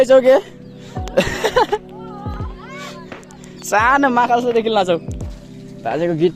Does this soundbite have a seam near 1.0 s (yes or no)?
no